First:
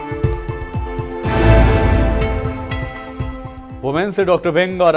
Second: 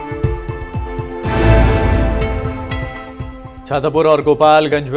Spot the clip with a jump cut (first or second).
second